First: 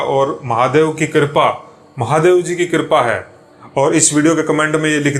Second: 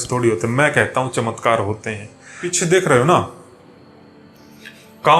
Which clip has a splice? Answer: second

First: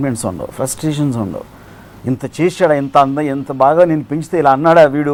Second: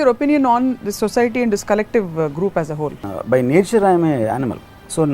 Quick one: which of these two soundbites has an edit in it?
second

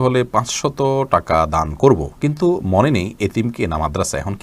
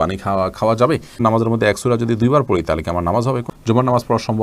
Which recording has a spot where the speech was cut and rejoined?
second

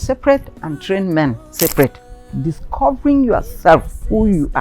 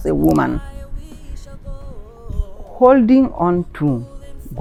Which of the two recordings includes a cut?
first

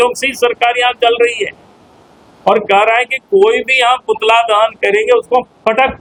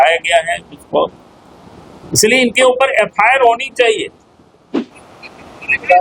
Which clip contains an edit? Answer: second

